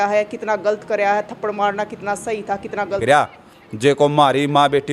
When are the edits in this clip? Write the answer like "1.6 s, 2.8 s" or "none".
3.0 s

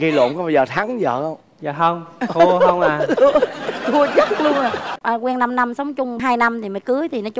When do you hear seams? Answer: 5.0 s

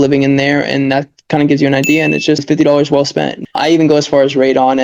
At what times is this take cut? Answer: 2.4 s, 3.4 s

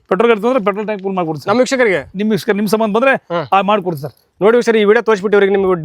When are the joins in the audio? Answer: none

